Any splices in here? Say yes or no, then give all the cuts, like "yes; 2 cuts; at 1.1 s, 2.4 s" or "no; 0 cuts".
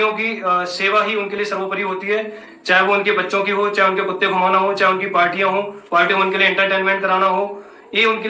no; 0 cuts